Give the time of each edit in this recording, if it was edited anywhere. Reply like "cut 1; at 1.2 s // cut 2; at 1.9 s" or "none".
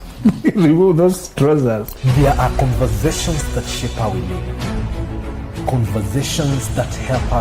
cut 1; at 1.9 s